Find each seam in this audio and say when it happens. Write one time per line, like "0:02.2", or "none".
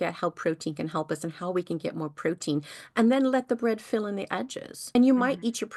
none

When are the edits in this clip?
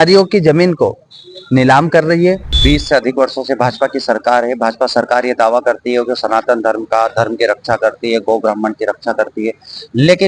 0:02.5

